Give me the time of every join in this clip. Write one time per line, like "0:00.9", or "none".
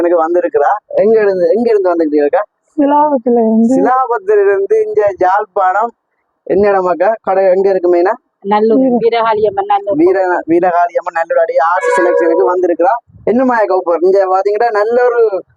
none